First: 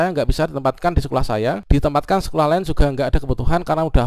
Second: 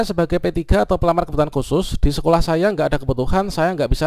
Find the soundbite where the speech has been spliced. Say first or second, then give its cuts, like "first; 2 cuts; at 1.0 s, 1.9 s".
first; 1 cut; at 1.6 s